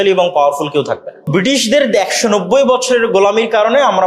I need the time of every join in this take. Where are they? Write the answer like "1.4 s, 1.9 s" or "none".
1.5 s